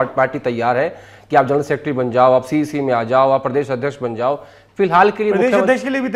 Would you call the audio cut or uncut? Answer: uncut